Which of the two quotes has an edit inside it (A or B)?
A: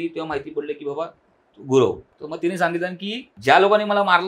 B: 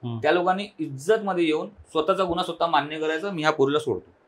A